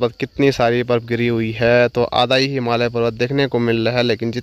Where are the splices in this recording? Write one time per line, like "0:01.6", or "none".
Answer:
none